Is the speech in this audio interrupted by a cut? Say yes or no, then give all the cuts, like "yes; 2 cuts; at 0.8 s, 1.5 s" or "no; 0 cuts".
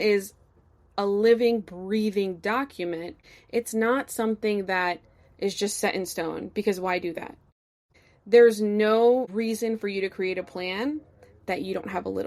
yes; 2 cuts; at 3.2 s, 7.9 s